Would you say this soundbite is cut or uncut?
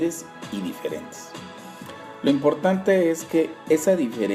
uncut